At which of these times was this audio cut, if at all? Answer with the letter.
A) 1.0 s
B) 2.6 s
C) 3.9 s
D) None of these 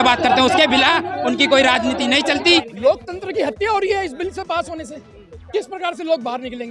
B